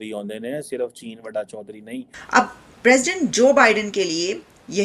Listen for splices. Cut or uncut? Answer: cut